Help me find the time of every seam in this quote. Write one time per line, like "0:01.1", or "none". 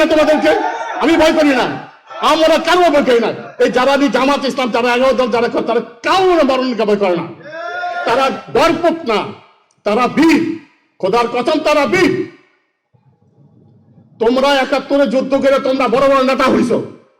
none